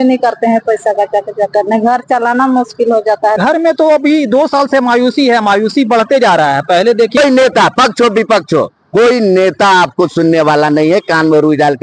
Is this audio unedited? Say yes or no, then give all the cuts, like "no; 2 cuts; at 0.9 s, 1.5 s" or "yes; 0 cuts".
no; 2 cuts; at 3.4 s, 7.2 s